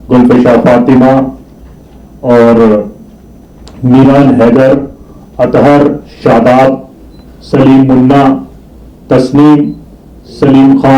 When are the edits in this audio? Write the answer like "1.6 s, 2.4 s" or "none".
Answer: none